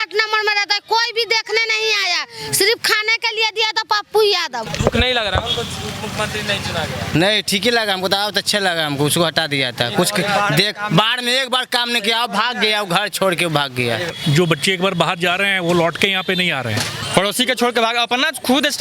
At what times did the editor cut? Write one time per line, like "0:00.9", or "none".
0:04.6
0:14.1
0:17.0

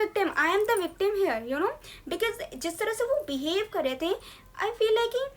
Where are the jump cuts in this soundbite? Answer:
none

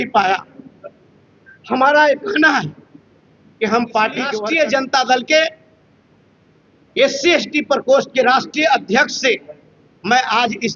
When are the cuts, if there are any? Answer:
0:04.4

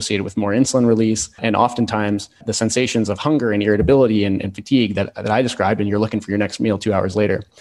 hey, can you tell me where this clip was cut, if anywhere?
0:01.3
0:02.4

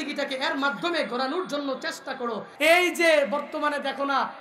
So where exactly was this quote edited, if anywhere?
0:02.5

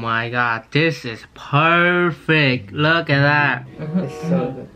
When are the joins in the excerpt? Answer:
0:03.6

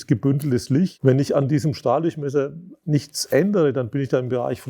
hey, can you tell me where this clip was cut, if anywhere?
0:00.9

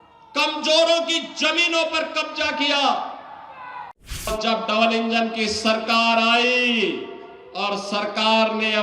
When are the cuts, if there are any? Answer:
0:04.3

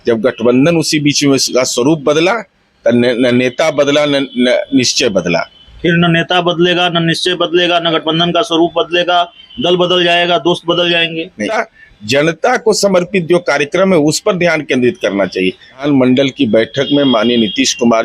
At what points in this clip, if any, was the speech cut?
0:11.6
0:15.8

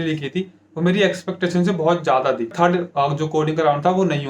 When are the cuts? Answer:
0:02.5

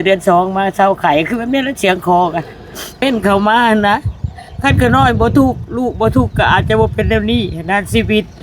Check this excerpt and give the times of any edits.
0:03.0

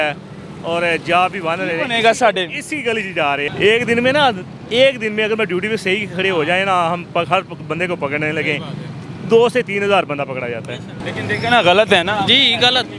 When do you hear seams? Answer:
0:03.5
0:10.9

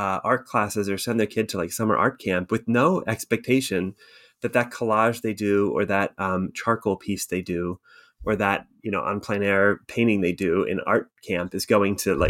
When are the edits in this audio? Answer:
none

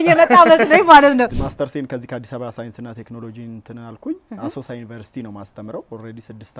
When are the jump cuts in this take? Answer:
0:01.4

